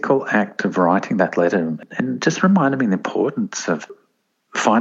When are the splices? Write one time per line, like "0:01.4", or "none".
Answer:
0:01.8